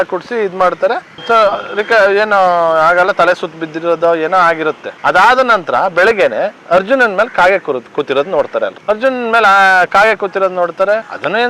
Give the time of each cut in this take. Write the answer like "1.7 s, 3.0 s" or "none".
8.8 s